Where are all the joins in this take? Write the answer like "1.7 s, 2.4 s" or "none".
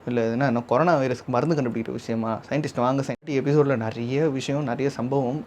3.3 s